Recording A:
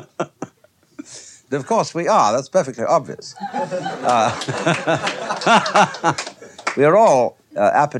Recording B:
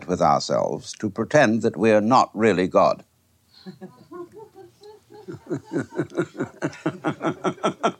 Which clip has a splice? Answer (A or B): B